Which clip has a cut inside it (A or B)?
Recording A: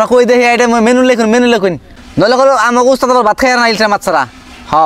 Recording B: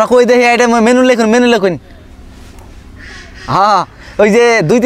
A